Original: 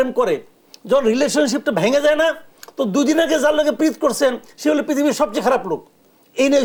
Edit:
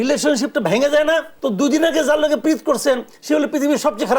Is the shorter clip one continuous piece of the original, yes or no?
no